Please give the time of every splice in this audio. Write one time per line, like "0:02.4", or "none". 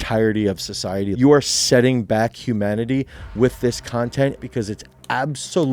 0:01.1
0:04.4

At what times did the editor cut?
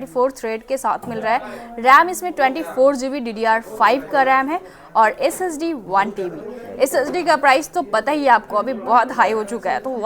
none

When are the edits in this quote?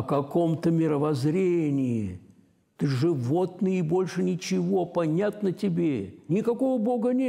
0:06.2

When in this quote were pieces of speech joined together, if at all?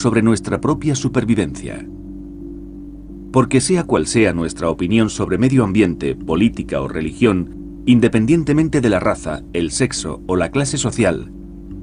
0:03.1

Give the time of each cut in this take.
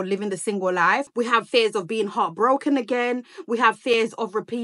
0:01.1

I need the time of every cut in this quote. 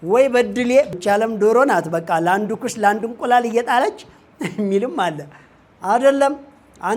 0:00.9

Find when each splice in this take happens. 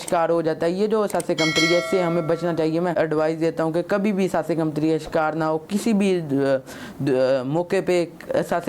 none

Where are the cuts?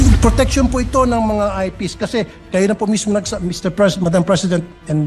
none

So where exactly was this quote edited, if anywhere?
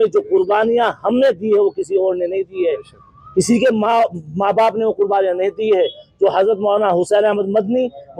none

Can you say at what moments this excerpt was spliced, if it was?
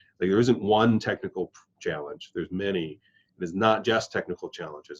none

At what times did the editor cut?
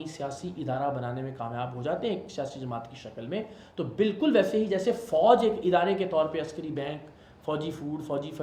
none

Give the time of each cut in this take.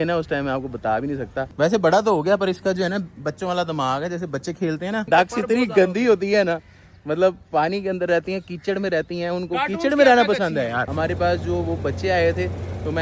0:01.5
0:05.1
0:10.9

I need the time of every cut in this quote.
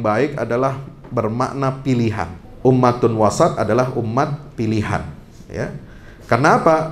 0:02.4

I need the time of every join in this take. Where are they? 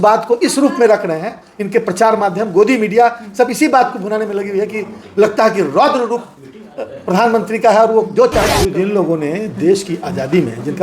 0:08.6

